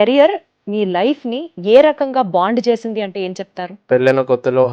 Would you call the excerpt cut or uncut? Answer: cut